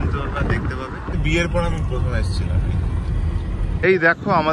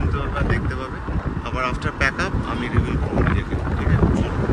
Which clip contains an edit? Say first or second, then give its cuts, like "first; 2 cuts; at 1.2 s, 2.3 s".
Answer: first; 2 cuts; at 1.2 s, 3.8 s